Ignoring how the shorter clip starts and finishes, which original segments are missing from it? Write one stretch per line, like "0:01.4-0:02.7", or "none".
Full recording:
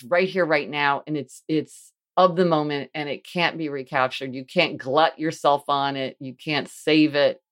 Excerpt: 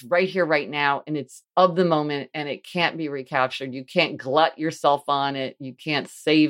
0:01.3-0:01.9